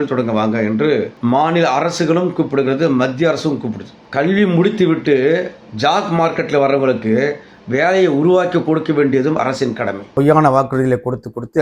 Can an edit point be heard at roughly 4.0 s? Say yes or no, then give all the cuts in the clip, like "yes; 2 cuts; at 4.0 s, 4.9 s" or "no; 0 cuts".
yes; 2 cuts; at 4.0 s, 10.1 s